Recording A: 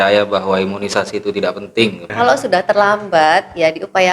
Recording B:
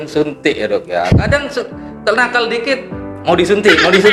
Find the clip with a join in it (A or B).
A